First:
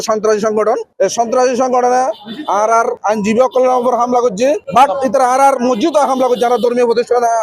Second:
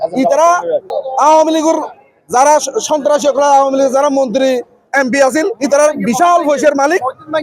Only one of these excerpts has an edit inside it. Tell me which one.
second; 1 cut; at 1.0 s

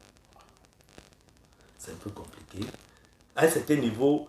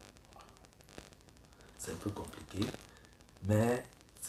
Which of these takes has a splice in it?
first; 1 cut; at 3.2 s

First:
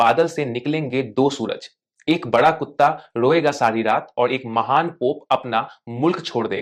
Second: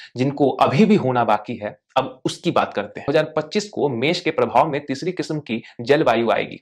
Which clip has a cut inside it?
second; 1 cut; at 3.1 s

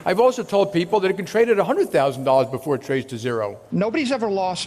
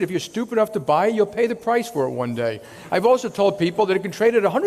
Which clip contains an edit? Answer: first; 1 cut; at 3.6 s

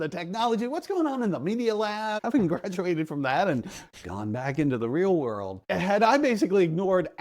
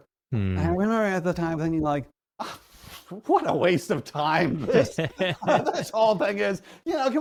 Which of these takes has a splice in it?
first; 2 cuts; at 2.2 s, 5.5 s

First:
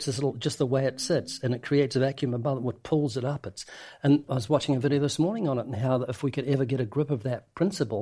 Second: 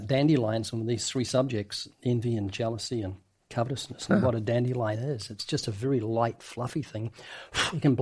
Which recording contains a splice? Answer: first; 1 cut; at 4.2 s

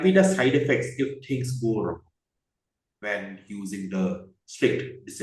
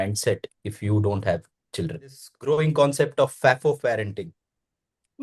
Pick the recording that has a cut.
second; 1 cut; at 2.3 s

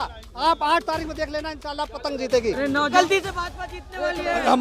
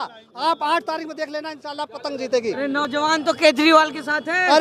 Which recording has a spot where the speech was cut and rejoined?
first; 1 cut; at 2.9 s

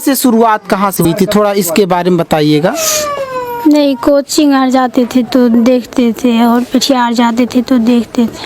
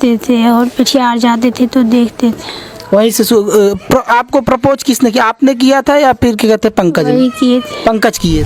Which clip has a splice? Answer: first; 1 cut; at 1.0 s

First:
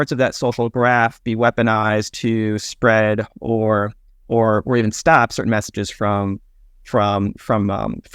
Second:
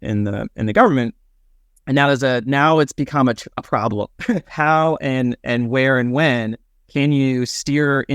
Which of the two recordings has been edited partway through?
second; 1 cut; at 4.5 s

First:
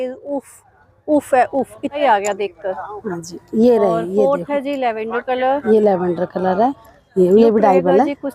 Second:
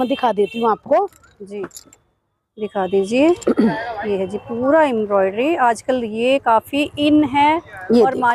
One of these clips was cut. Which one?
first; 2 cuts; at 2.0 s, 6.9 s

